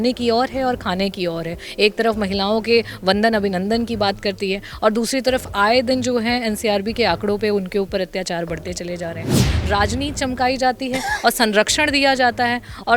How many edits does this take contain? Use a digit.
1